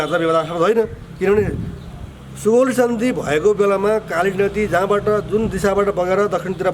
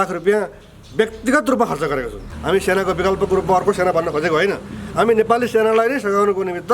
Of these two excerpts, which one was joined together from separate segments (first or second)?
second